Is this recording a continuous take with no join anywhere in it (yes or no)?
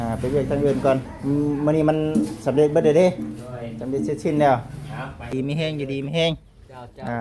no